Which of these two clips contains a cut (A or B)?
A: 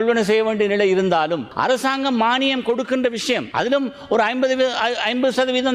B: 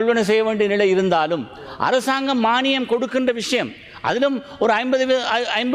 A